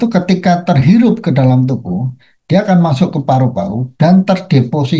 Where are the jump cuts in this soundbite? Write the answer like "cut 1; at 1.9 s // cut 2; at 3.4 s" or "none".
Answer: none